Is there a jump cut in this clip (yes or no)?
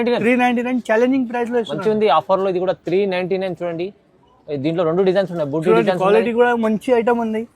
no